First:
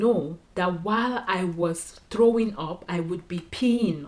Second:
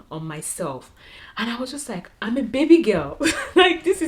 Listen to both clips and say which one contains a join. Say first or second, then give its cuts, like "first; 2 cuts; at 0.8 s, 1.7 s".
second; 1 cut; at 1.2 s